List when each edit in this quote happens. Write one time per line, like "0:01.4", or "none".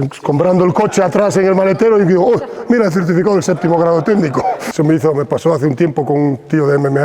0:04.6